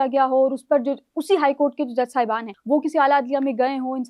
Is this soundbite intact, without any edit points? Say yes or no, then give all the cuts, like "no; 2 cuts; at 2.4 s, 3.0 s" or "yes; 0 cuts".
no; 1 cut; at 2.5 s